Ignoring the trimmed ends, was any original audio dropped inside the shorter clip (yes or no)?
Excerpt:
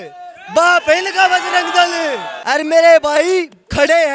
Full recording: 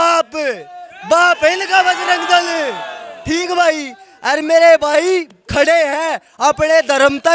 yes